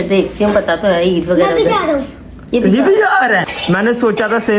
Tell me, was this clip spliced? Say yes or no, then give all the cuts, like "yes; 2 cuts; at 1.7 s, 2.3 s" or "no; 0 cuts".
yes; 1 cut; at 3.5 s